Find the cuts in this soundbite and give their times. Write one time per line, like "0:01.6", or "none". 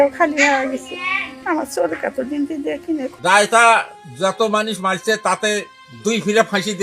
0:03.1